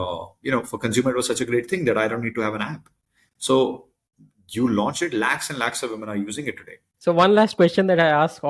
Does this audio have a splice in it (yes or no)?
yes